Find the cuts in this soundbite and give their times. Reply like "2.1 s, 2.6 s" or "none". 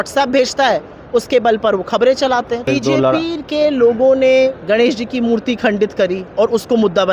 2.6 s